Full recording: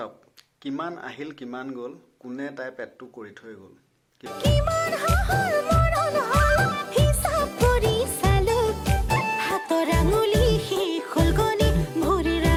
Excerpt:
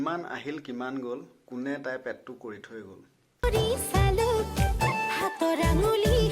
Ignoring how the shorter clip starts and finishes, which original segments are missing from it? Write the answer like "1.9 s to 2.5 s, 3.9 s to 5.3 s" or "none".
4.2 s to 7.7 s